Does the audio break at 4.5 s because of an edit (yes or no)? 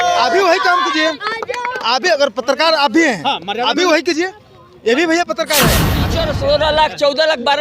no